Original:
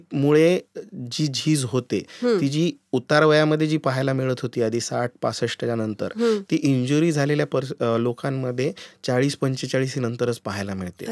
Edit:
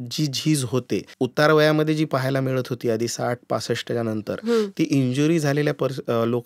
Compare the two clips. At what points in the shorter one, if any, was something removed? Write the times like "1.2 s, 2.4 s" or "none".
1.1 s